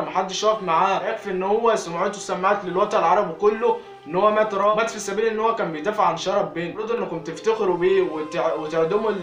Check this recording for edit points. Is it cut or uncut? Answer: cut